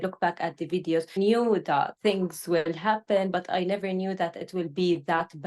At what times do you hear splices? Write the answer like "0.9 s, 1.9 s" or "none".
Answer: 1.2 s, 1.9 s